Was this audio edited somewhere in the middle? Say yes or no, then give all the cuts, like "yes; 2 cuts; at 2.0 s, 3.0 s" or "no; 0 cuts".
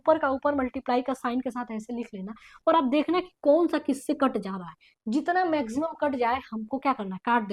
no; 0 cuts